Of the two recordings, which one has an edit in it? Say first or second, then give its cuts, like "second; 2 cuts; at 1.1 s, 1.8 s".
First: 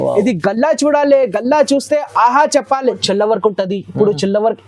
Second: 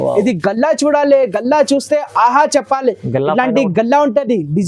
first; 1 cut; at 3.0 s